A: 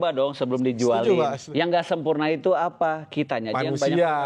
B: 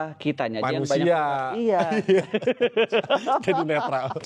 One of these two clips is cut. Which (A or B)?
A